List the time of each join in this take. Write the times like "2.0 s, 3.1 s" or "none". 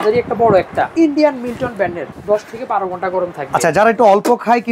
0.9 s, 2.1 s